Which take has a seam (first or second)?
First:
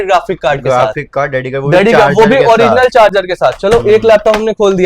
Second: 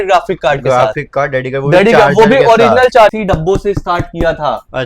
second